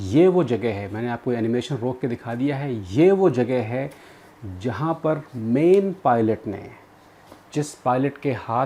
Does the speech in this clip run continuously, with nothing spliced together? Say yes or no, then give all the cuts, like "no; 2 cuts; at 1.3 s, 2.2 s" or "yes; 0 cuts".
yes; 0 cuts